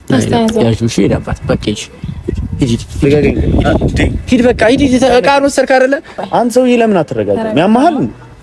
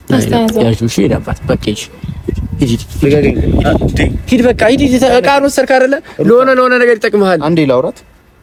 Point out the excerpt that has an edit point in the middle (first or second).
first